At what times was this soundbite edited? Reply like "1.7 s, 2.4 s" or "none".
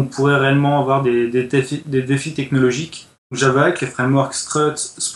3.4 s